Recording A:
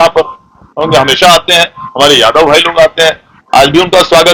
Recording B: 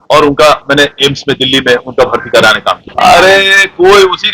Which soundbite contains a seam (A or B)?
B